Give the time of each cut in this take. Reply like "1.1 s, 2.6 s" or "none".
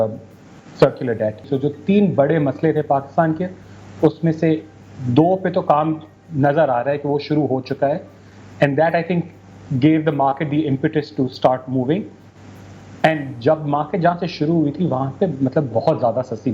1.5 s